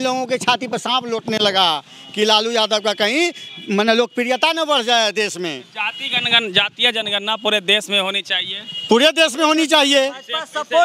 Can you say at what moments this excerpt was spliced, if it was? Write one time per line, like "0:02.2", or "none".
none